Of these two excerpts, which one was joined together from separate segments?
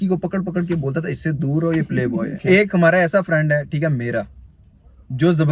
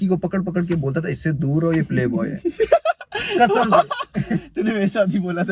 first; 1 cut; at 2.3 s

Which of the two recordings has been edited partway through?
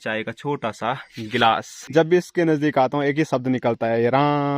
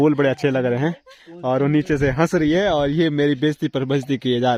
first; 1 cut; at 1.7 s

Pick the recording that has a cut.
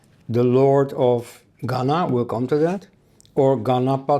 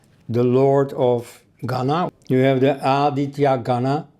second; 1 cut; at 2.1 s

